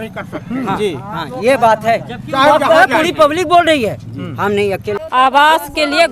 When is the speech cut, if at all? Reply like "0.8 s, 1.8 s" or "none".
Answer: 5.0 s